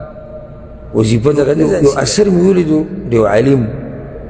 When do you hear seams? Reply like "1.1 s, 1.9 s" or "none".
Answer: 1.5 s